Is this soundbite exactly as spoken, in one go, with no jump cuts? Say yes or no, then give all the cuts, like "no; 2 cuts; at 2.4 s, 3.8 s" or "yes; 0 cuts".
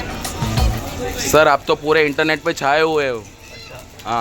yes; 0 cuts